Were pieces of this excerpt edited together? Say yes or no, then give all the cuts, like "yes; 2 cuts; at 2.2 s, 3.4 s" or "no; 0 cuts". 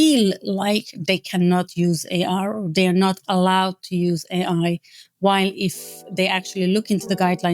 no; 0 cuts